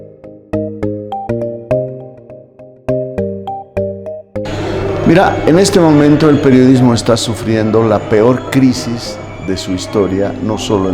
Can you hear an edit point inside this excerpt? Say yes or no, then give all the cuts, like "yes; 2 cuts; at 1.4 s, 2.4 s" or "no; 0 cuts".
yes; 1 cut; at 4.4 s